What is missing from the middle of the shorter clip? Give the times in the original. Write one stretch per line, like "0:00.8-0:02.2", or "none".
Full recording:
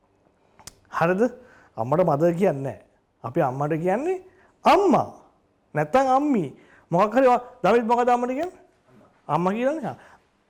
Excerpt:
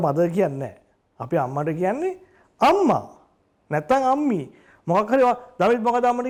none